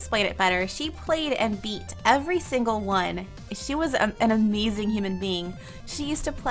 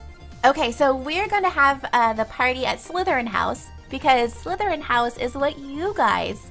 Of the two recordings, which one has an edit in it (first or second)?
first